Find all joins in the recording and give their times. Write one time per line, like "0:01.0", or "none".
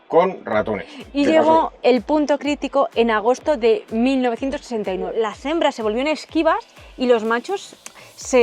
0:01.0
0:05.1